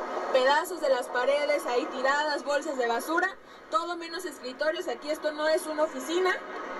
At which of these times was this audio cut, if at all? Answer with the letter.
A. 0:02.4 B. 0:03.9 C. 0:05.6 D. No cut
D